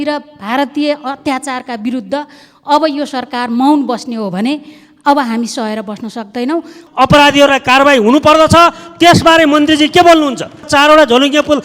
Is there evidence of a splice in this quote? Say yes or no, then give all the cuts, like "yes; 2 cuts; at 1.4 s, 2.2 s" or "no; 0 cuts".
yes; 2 cuts; at 6.8 s, 10.7 s